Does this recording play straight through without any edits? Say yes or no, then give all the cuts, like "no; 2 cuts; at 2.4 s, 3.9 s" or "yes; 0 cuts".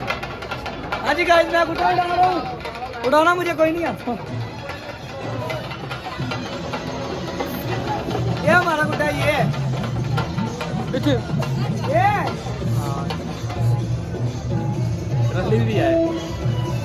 yes; 0 cuts